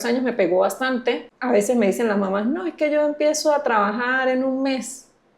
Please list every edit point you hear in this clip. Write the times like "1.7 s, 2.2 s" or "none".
1.3 s